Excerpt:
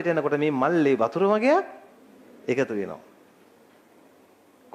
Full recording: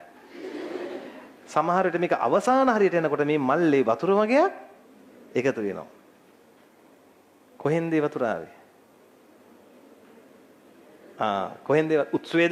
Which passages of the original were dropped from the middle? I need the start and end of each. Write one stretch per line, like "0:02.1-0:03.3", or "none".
none